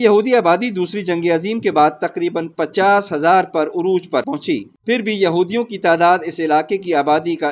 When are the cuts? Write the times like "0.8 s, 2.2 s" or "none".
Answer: none